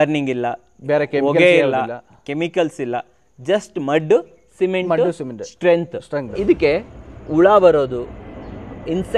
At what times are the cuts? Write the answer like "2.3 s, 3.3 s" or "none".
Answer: 6.3 s